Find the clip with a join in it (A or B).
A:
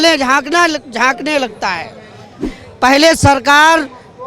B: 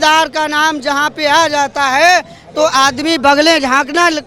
A